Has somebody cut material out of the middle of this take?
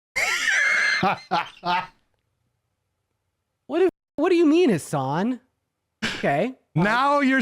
no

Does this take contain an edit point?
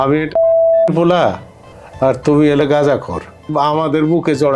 yes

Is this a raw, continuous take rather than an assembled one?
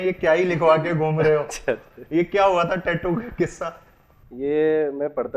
yes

